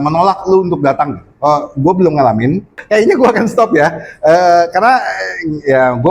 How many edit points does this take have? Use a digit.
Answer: 1